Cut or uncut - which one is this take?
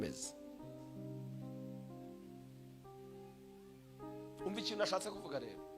uncut